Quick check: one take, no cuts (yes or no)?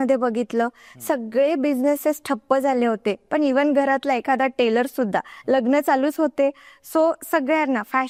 yes